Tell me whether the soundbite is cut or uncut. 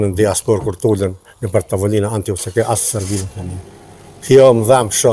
uncut